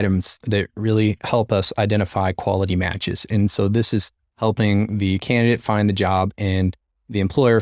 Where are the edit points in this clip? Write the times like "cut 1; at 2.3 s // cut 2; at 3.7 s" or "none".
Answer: none

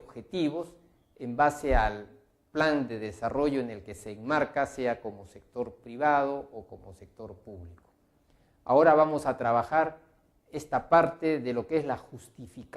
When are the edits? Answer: cut 1; at 4.9 s

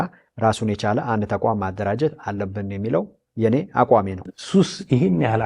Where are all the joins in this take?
cut 1; at 4.2 s

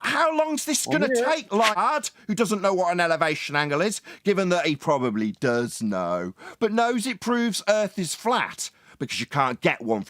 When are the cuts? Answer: cut 1; at 1.7 s

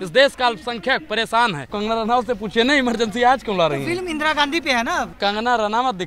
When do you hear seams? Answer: cut 1; at 1.7 s // cut 2; at 5.1 s

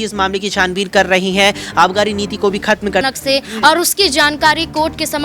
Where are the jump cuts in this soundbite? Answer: cut 1; at 3.0 s

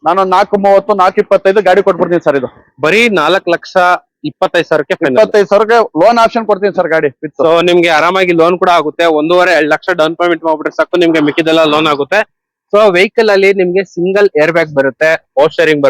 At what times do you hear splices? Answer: none

